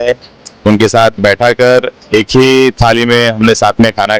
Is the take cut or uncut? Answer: uncut